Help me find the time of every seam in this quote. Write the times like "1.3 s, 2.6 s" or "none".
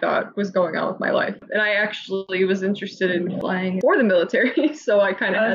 1.4 s, 3.5 s